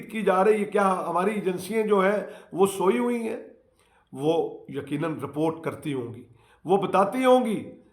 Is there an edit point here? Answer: no; 0 cuts

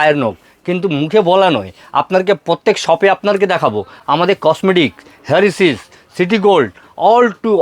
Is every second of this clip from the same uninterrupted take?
yes; 0 cuts

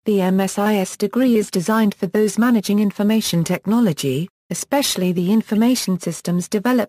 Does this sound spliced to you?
yes; 2 cuts; at 1.3 s, 2.0 s

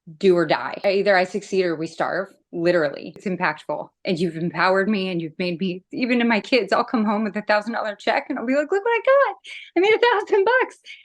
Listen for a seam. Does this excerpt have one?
yes; 2 cuts; at 0.8 s, 3.3 s

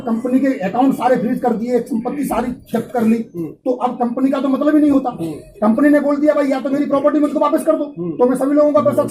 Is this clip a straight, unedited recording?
yes; 0 cuts

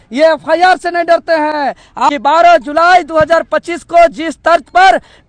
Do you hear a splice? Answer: yes; 1 cut; at 2.1 s

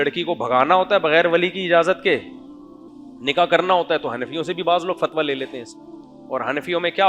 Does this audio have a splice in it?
no; 0 cuts

